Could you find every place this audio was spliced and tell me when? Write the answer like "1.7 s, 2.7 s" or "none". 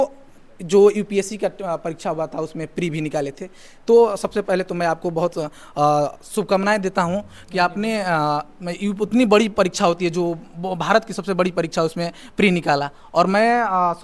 none